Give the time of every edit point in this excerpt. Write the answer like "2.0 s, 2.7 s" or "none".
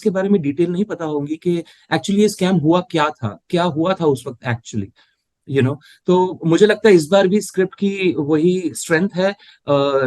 none